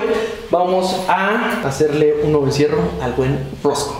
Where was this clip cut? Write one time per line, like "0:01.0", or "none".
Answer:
0:01.6